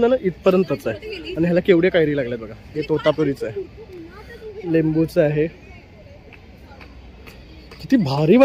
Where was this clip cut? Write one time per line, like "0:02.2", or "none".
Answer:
none